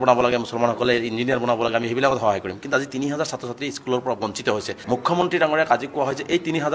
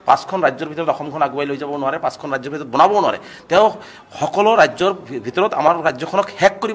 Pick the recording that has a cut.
first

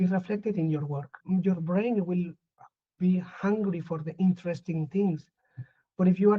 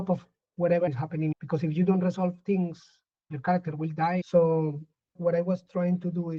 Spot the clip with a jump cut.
first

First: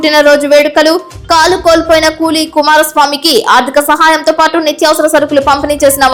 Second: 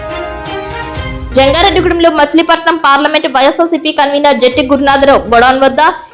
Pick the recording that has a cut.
second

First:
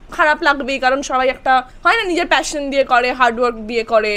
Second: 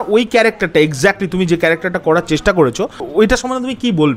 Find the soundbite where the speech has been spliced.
second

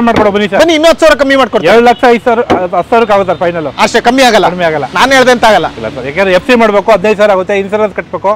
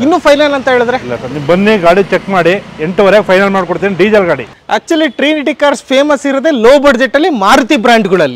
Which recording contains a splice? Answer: second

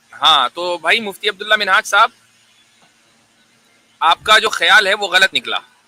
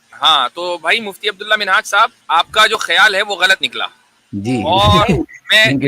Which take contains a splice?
second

